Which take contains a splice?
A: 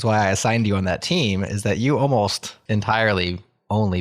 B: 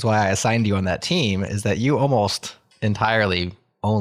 A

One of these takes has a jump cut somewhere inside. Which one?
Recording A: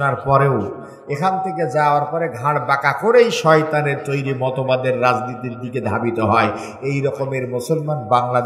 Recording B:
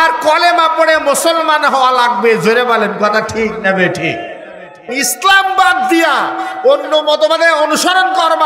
B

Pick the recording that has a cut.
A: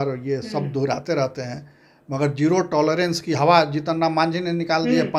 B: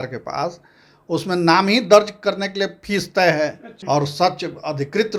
B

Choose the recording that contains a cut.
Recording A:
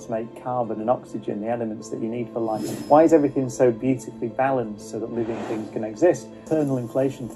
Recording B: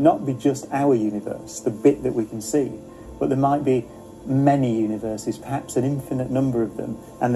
A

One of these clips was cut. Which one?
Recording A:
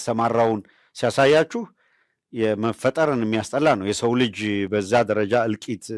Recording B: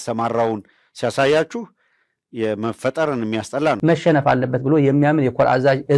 B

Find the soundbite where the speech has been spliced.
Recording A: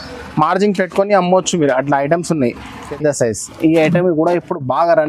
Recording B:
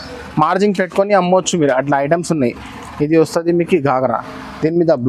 A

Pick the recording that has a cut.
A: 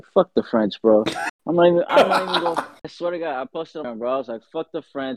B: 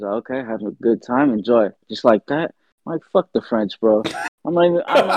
B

